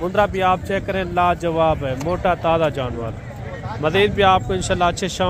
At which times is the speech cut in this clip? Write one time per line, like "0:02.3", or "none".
none